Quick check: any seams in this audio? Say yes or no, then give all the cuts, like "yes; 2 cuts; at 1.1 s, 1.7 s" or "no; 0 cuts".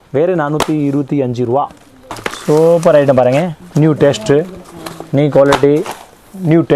yes; 1 cut; at 2.3 s